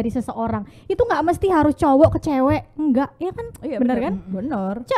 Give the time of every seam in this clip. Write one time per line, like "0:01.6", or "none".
none